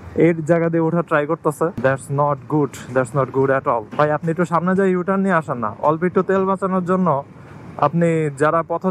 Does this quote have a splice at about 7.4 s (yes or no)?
no